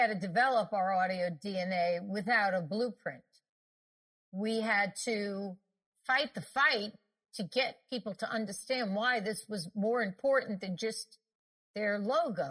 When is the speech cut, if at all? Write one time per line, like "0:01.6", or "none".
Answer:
none